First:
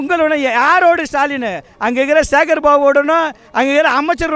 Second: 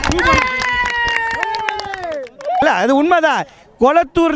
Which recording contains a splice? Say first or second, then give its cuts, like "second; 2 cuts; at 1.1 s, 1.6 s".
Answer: second; 1 cut; at 2.6 s